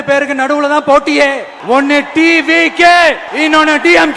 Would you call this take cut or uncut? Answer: cut